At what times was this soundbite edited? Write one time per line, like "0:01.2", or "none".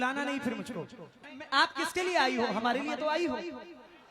0:01.2